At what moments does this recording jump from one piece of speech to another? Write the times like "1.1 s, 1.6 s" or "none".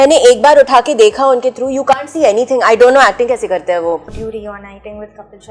4.1 s